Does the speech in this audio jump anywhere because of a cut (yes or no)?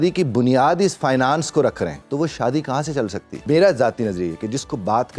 yes